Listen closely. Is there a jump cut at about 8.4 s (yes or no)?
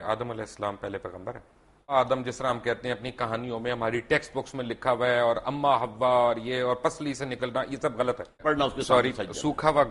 yes